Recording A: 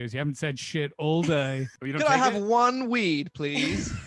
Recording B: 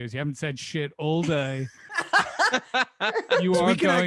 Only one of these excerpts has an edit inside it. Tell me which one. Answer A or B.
A